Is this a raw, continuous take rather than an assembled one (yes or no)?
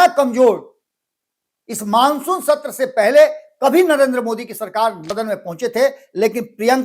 no